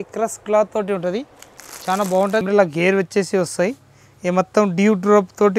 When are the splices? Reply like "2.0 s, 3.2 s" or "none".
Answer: 2.4 s